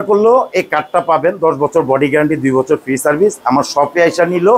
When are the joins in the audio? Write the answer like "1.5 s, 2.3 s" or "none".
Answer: none